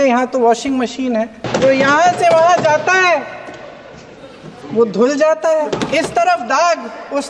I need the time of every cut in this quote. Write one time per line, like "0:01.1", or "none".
0:01.4
0:05.7